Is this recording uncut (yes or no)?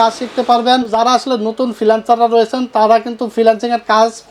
no